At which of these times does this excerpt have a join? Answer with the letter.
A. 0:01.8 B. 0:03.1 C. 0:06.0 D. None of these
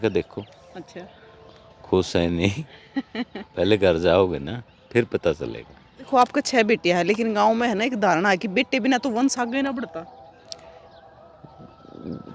C